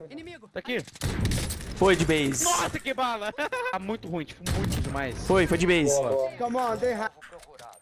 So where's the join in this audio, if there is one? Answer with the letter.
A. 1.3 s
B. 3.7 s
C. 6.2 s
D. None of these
B